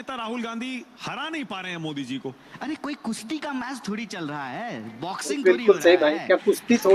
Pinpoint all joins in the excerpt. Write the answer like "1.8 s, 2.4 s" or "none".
5.3 s

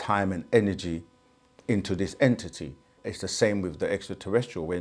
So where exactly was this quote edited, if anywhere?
3.0 s

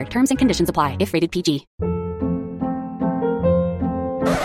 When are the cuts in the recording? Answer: 1.7 s

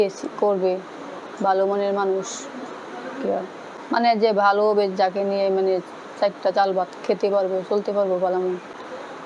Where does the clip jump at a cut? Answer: none

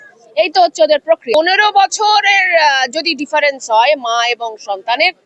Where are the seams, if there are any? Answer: 1.3 s

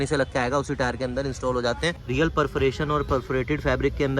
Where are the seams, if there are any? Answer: 2.0 s

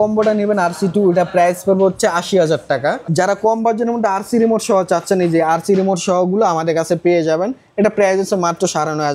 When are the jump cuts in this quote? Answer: 3.0 s

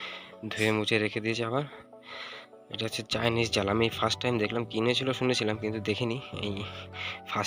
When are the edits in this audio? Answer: none

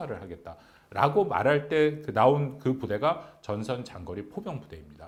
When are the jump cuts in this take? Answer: none

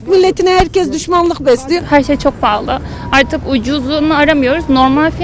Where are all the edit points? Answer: 1.8 s

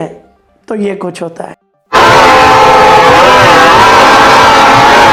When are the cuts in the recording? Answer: none

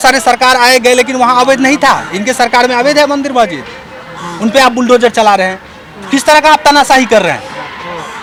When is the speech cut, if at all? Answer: none

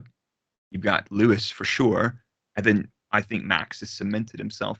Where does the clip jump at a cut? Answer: none

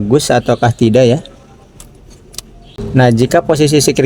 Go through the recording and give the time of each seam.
2.8 s

